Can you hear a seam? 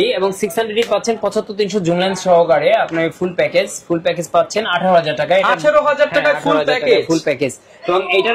no; 0 cuts

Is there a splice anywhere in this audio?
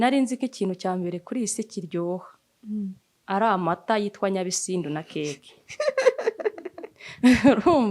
no; 0 cuts

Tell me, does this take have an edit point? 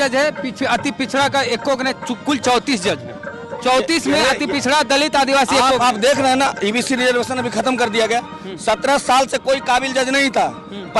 no; 0 cuts

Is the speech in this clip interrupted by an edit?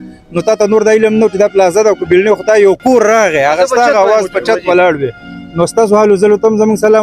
no; 0 cuts

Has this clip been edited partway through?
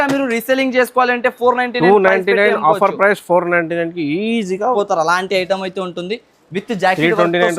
yes; 1 cut; at 4.7 s

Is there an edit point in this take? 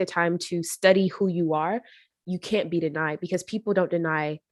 no; 0 cuts

